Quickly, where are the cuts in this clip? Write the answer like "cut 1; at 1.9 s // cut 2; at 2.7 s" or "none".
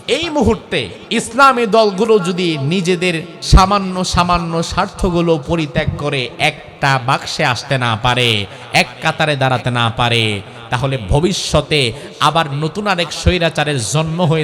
cut 1; at 1.0 s // cut 2; at 3.3 s

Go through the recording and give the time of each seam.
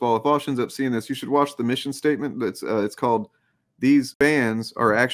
none

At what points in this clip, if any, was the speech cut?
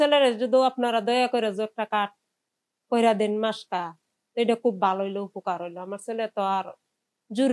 none

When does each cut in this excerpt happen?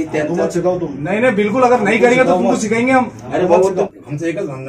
none

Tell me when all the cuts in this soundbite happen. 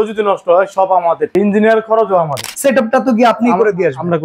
cut 1; at 1.3 s // cut 2; at 2.5 s

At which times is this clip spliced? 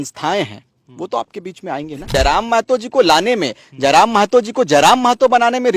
cut 1; at 2.1 s

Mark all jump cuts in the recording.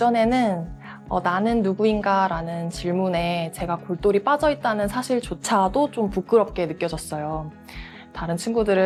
none

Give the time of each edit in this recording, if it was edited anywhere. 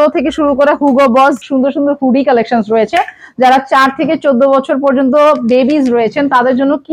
cut 1; at 1.4 s

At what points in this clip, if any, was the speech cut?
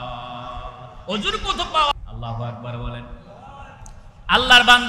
cut 1; at 1.9 s

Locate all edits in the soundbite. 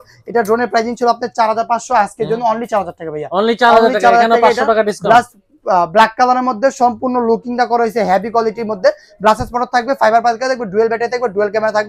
none

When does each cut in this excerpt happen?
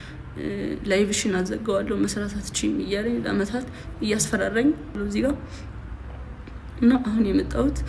cut 1; at 5.0 s

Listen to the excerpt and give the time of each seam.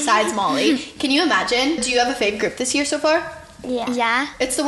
cut 1; at 1.8 s

